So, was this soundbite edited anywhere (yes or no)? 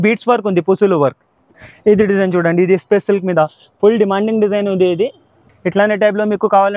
no